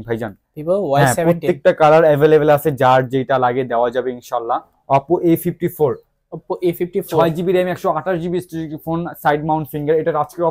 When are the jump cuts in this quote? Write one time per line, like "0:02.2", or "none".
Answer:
0:04.8